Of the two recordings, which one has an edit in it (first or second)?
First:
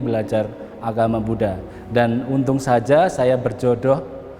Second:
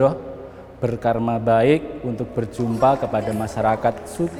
first